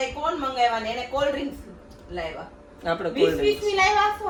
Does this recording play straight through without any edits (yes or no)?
yes